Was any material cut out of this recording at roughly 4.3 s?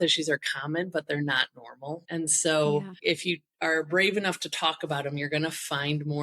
no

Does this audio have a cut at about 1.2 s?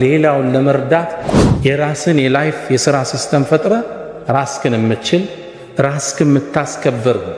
yes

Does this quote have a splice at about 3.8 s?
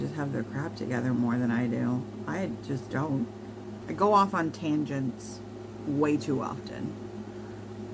yes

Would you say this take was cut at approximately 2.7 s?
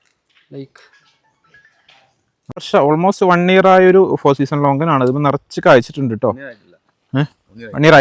yes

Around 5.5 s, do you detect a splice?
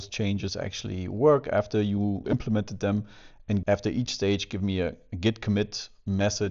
no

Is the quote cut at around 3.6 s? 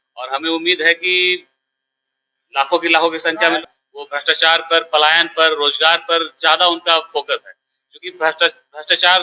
yes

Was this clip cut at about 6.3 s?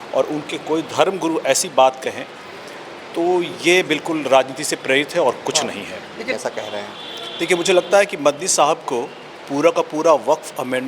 yes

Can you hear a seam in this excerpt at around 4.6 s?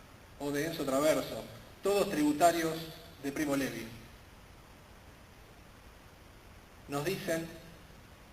no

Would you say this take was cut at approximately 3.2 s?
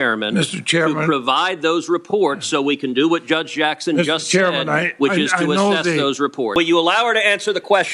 no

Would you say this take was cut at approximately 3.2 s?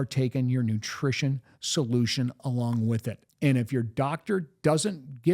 yes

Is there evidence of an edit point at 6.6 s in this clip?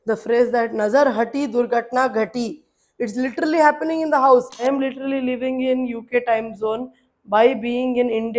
no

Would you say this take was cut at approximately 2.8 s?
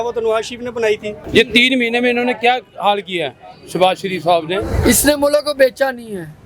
no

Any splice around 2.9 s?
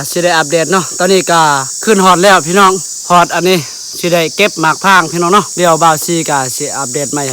yes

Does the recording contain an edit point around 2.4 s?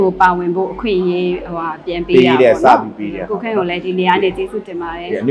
no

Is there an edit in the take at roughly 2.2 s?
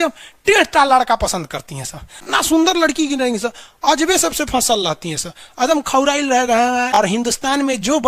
yes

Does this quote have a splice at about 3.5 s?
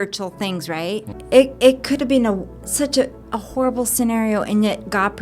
no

